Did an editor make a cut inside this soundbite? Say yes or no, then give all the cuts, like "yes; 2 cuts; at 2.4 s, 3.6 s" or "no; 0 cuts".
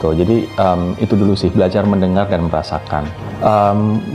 yes; 1 cut; at 3.2 s